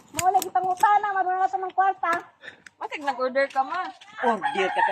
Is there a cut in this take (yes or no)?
no